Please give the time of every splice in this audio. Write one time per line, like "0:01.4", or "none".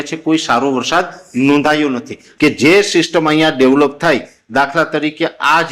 0:02.2

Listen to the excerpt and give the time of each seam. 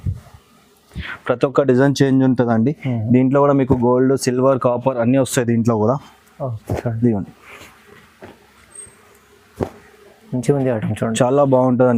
none

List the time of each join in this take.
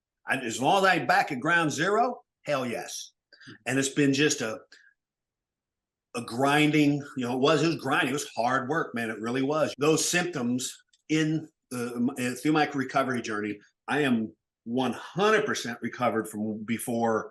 0:09.7

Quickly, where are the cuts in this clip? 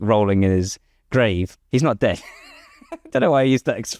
0:01.5

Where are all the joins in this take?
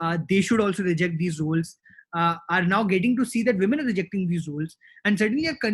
none

